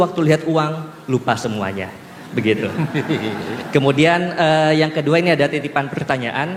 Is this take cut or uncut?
uncut